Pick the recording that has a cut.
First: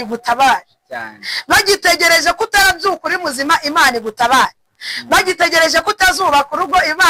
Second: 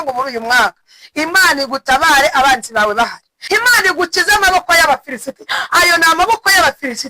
second; 1 cut; at 3.3 s

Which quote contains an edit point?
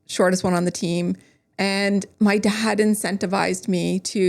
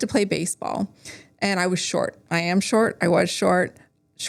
first; 1 cut; at 2.1 s

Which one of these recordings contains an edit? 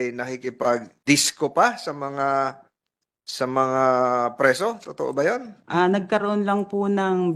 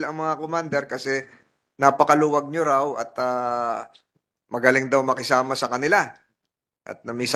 first; 2 cuts; at 0.9 s, 5.6 s

